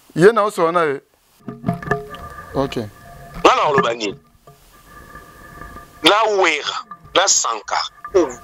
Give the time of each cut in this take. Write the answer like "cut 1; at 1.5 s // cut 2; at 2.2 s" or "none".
cut 1; at 1.4 s